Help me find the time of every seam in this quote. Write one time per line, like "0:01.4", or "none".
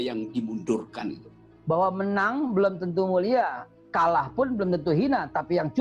0:01.5